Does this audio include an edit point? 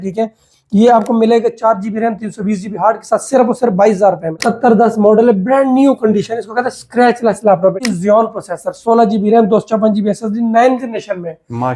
yes; 2 cuts; at 4.4 s, 7.8 s

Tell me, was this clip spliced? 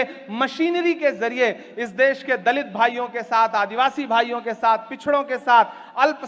no; 0 cuts

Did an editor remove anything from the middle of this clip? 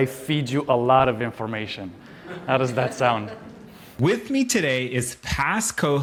no; 0 cuts

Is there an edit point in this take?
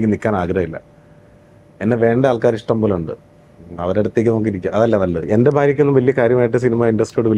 yes; 1 cut; at 5.2 s

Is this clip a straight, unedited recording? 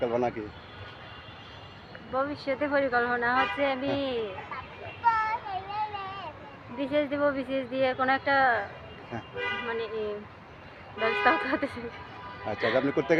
yes; 0 cuts

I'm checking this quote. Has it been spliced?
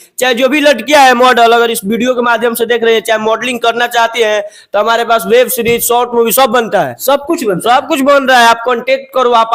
no; 0 cuts

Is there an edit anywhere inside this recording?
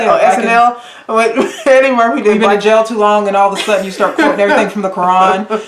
no; 0 cuts

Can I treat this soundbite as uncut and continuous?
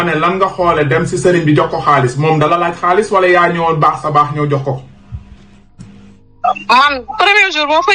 yes; 0 cuts

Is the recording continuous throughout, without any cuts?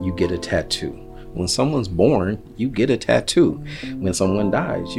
no; 1 cut; at 1.4 s

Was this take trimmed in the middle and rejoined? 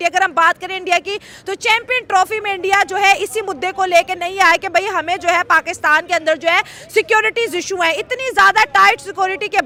no; 0 cuts

